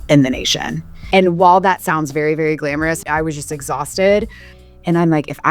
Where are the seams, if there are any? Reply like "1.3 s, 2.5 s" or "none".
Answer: 0.9 s, 3.0 s, 4.5 s